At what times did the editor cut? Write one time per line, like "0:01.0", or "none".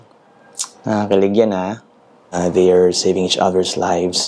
0:02.3